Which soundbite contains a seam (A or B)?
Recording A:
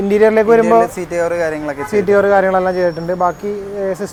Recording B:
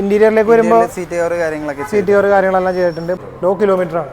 B